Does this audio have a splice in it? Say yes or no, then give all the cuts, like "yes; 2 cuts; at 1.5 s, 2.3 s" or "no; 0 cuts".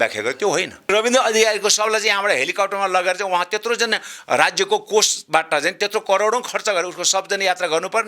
yes; 1 cut; at 0.9 s